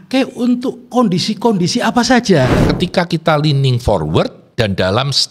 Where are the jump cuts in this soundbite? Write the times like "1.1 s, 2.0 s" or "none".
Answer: 2.6 s, 4.4 s